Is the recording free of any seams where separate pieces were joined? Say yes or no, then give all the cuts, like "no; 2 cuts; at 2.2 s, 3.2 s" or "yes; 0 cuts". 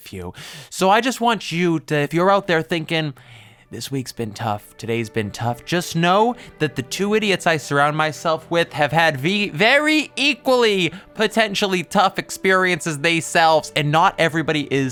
yes; 0 cuts